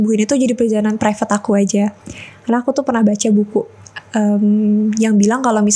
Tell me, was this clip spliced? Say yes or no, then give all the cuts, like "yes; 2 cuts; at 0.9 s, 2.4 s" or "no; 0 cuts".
no; 0 cuts